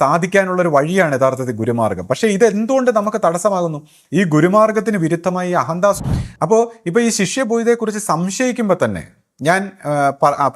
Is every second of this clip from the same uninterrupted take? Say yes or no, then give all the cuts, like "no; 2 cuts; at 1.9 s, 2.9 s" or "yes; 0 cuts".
no; 1 cut; at 6.0 s